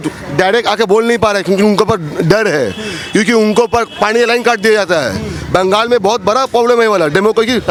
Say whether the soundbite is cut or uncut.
uncut